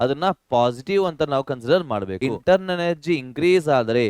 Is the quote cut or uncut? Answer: cut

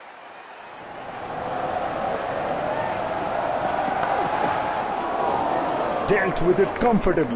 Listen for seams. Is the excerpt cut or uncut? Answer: uncut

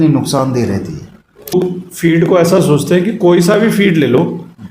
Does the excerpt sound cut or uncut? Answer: cut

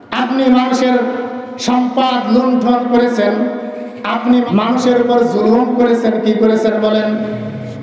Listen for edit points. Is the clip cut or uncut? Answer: cut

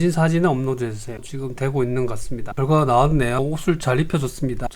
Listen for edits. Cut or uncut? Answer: cut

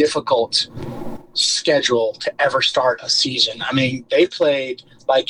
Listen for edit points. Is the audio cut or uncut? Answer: uncut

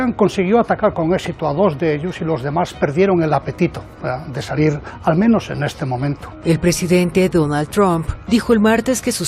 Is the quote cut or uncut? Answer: cut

